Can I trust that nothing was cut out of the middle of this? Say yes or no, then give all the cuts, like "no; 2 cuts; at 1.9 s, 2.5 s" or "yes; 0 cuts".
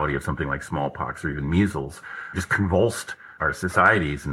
no; 1 cut; at 2.3 s